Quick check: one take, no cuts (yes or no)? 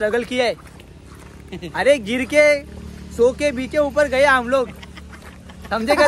yes